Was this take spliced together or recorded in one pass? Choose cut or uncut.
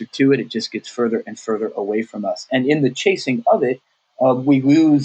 uncut